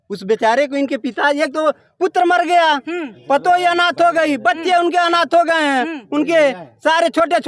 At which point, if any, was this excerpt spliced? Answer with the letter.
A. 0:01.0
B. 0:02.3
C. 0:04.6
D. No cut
D